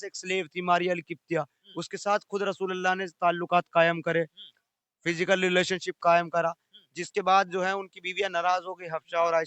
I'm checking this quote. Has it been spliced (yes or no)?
no